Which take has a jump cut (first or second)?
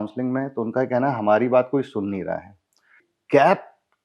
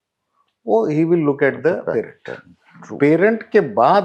first